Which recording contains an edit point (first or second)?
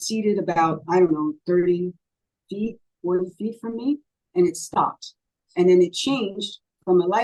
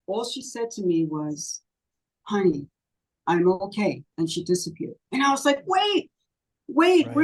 second